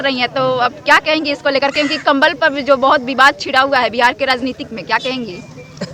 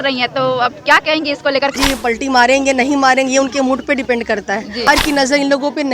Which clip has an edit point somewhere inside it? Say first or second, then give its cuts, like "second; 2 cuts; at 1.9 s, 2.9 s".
second; 2 cuts; at 1.8 s, 4.9 s